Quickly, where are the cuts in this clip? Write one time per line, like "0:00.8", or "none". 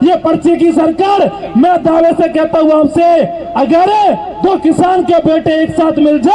none